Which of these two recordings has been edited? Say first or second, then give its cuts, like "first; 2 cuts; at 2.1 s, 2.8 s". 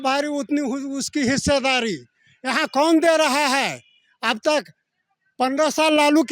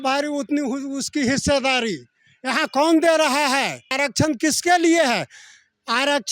second; 1 cut; at 3.9 s